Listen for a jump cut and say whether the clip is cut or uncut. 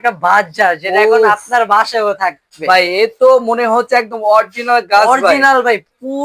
uncut